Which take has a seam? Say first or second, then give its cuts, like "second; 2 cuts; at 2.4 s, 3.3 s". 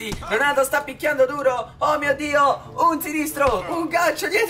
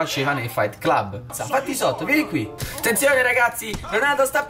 second; 2 cuts; at 1.2 s, 2.7 s